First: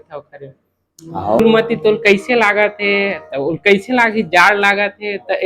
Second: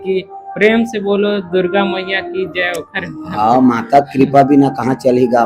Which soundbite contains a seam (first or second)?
first